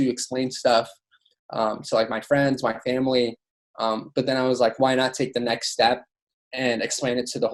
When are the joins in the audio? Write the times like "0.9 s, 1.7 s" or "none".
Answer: none

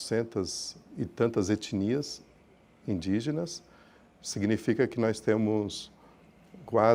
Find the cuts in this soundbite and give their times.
none

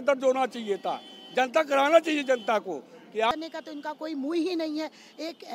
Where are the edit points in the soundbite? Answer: 3.3 s

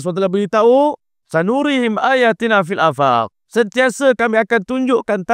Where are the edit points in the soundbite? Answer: 1.1 s, 3.4 s

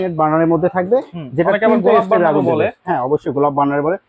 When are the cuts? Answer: none

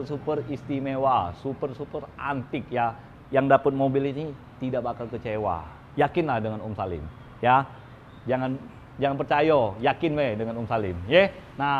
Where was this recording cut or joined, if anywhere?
none

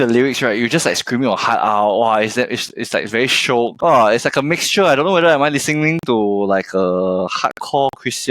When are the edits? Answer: 3.9 s

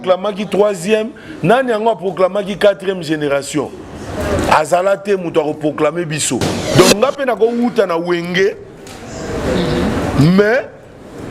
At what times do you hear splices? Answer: 6.7 s

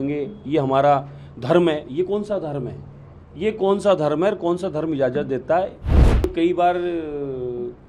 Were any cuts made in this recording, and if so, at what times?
6.2 s

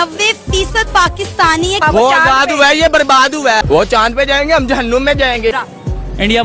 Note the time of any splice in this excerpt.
1.8 s, 3.6 s, 5.5 s

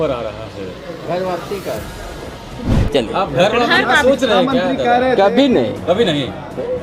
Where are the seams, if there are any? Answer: 2.8 s

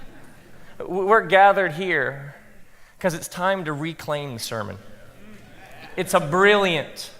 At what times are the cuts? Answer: 6.0 s

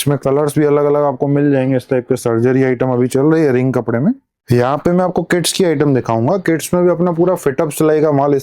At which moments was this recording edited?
4.4 s

